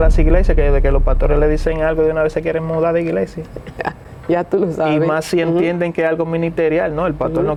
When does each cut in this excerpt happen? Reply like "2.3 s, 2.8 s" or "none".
none